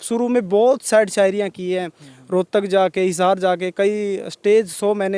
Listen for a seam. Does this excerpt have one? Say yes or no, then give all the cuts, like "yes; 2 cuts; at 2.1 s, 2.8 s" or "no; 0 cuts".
no; 0 cuts